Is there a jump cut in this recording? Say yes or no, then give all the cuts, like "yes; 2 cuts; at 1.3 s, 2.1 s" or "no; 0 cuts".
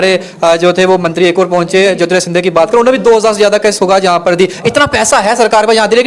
no; 0 cuts